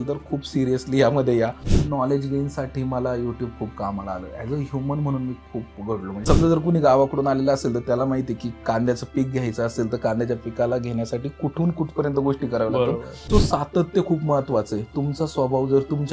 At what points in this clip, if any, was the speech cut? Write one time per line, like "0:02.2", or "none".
0:01.7
0:06.1
0:13.1

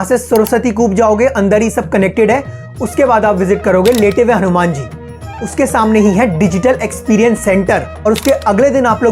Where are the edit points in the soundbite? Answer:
0:07.9

